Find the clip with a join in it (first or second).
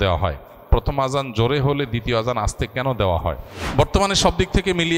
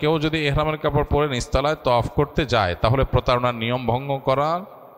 first